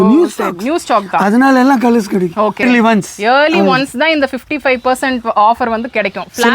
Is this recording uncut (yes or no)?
no